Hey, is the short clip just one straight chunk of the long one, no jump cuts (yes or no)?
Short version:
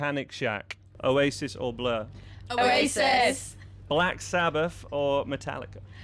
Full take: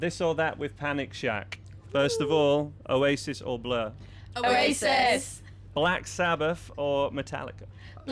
no